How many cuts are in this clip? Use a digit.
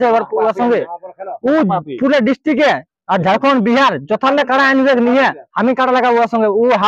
0